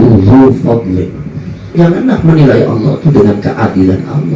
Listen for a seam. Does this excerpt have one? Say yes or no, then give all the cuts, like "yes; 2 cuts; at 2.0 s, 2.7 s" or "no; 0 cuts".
yes; 1 cut; at 1.8 s